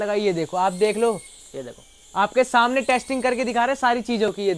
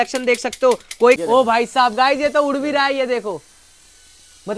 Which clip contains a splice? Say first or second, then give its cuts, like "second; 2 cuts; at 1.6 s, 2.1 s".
second; 1 cut; at 1.2 s